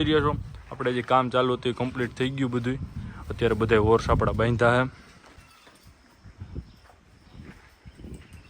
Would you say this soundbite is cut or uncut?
cut